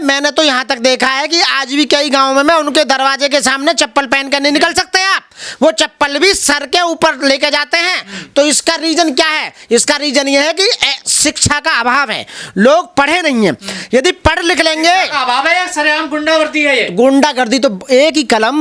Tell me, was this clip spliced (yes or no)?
no